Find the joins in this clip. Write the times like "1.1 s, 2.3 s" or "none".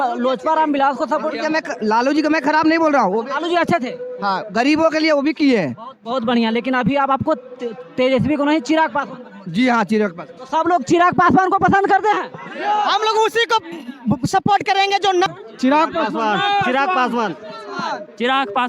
15.3 s